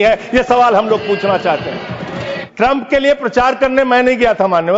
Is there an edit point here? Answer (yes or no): yes